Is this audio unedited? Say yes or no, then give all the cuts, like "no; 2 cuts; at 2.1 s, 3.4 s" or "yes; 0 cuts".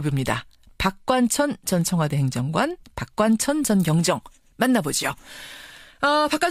no; 1 cut; at 2.5 s